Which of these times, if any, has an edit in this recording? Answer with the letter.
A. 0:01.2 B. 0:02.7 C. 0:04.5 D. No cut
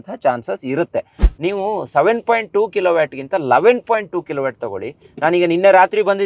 A